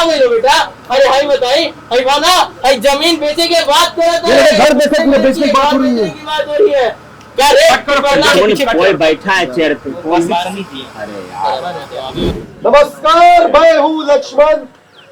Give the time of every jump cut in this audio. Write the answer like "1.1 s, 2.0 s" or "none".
12.3 s